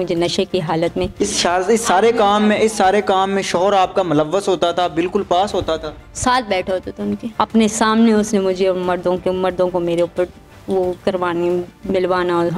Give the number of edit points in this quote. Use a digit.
1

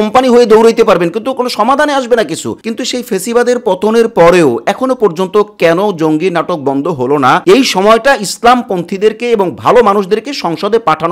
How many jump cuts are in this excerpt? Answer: 2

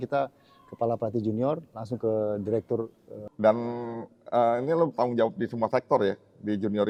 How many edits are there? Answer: 0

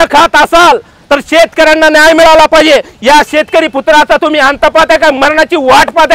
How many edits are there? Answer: 0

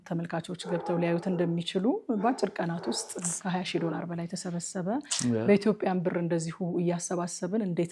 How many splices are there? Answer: 0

